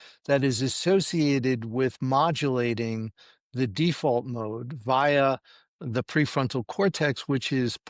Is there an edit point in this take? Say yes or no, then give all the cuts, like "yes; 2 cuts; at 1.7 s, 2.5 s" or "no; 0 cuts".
no; 0 cuts